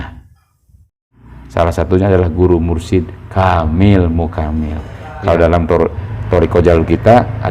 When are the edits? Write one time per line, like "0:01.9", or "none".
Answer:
0:00.9